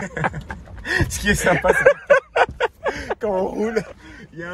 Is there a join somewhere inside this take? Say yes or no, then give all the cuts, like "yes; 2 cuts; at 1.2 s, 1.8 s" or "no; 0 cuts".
no; 0 cuts